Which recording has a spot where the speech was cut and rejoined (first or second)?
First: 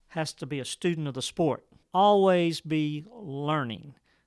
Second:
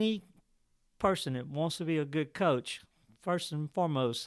first